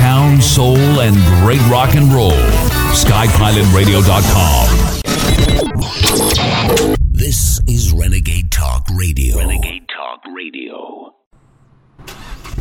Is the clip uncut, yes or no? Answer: yes